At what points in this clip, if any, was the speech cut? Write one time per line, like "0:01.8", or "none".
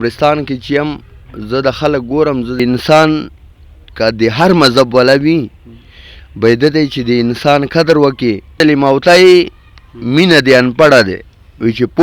0:02.6
0:08.5